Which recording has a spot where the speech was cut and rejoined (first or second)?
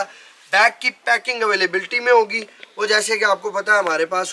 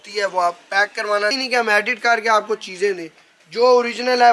second